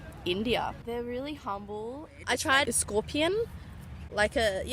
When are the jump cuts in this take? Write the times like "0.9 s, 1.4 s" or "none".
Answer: 0.8 s, 2.2 s